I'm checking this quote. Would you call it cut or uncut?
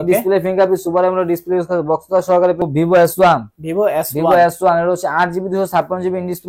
cut